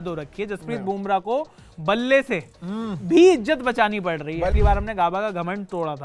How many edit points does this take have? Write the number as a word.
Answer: one